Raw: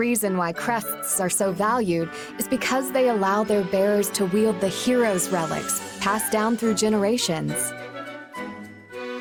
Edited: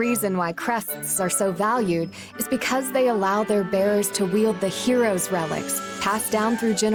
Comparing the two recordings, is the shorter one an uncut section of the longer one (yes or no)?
yes